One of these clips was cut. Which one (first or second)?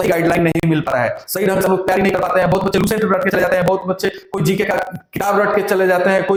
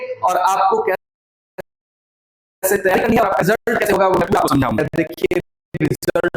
second